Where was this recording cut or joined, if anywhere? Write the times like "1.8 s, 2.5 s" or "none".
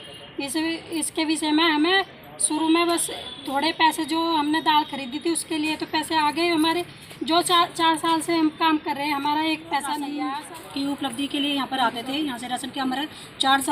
10.2 s

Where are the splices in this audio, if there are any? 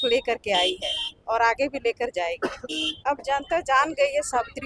2.9 s

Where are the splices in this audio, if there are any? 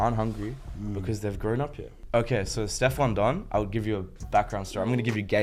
1.9 s

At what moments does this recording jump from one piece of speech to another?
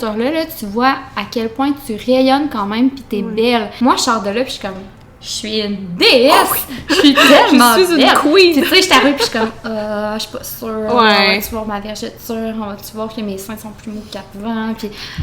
3.7 s

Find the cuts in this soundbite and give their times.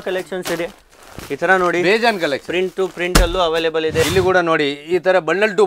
4.0 s

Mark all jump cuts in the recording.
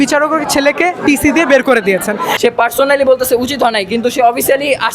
2.3 s

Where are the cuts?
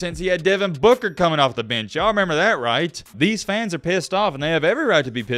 3.0 s

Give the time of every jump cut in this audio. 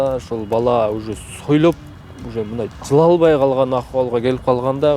none

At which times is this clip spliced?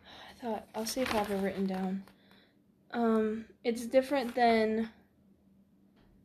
none

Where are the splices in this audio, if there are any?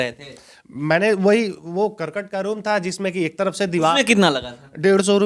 none

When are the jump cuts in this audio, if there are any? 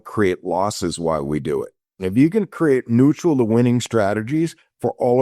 2.0 s

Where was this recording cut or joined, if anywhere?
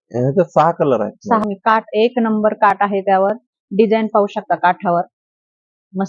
1.4 s

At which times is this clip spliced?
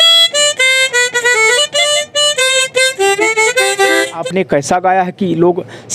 4.2 s

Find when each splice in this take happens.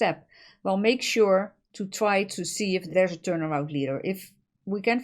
2.9 s

